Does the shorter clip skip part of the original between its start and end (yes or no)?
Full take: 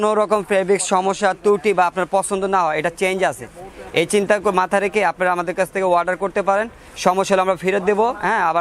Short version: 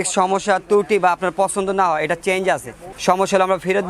yes